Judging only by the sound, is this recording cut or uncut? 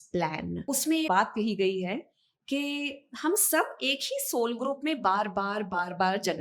cut